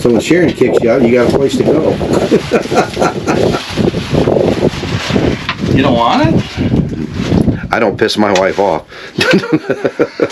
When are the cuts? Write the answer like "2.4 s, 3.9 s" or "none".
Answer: none